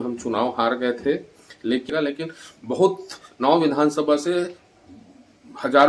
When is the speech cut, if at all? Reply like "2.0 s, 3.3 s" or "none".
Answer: 1.9 s